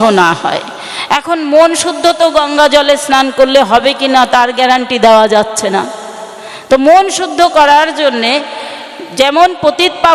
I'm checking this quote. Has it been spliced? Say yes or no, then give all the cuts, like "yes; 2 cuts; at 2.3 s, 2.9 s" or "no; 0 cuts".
no; 0 cuts